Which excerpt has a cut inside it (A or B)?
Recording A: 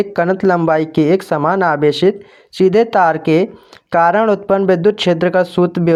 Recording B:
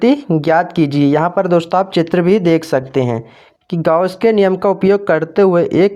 B